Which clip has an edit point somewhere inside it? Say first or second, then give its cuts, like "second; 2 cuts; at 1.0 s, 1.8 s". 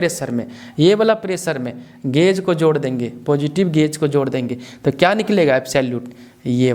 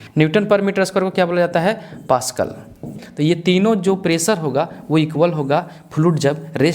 second; 1 cut; at 3.0 s